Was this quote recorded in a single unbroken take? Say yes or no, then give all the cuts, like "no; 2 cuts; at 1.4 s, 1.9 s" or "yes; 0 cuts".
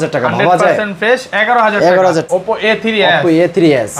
no; 1 cut; at 2.2 s